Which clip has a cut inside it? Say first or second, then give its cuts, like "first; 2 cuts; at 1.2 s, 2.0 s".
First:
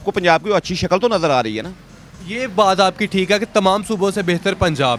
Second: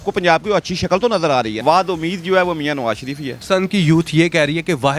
second; 2 cuts; at 1.6 s, 3.4 s